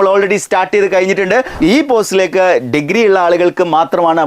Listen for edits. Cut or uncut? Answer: cut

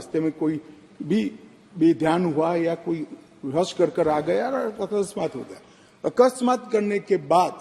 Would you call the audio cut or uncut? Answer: uncut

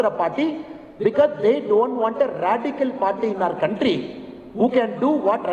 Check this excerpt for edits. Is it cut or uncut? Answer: uncut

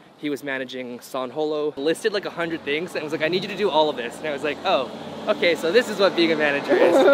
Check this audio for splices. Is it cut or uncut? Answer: cut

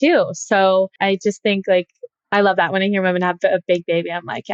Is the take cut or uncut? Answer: uncut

